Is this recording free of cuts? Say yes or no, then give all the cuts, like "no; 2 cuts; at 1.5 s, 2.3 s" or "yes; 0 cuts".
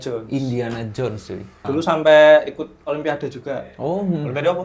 no; 1 cut; at 1.7 s